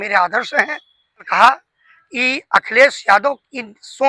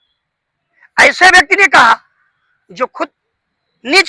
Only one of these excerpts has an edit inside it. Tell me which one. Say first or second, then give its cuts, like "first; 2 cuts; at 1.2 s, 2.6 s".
first; 1 cut; at 1.3 s